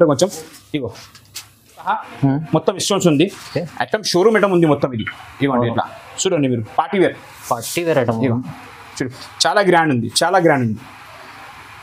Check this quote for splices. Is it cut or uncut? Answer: cut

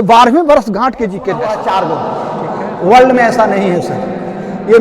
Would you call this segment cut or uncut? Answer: cut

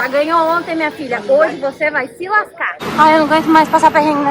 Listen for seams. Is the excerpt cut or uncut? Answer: cut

